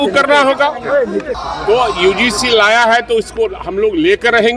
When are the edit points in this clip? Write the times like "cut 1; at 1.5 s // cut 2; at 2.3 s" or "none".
cut 1; at 1.4 s